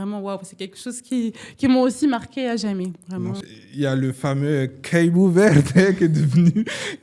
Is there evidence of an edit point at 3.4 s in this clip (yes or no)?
yes